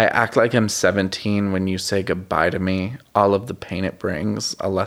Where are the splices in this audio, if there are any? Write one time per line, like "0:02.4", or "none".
none